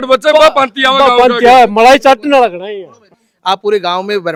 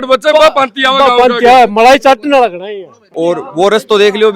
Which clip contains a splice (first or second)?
second